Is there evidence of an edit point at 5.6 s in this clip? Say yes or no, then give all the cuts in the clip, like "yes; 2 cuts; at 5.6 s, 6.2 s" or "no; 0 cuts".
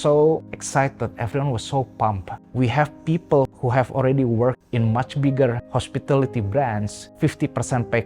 yes; 2 cuts; at 3.5 s, 5.6 s